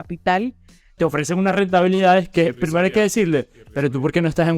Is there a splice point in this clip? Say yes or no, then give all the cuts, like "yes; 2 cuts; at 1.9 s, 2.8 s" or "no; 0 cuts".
yes; 1 cut; at 1.0 s